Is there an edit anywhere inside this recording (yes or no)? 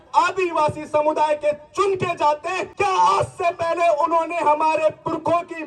yes